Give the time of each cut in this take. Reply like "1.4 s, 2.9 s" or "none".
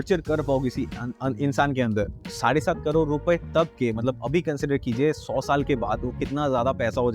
2.2 s